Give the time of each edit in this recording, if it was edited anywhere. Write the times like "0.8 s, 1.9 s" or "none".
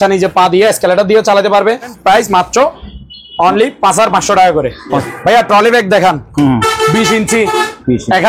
1.9 s, 5.0 s